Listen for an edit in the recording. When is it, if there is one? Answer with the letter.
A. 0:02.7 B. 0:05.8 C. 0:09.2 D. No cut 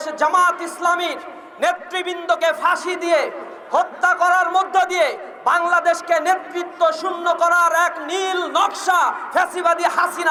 D